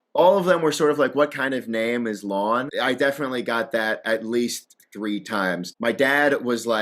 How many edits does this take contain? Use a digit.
2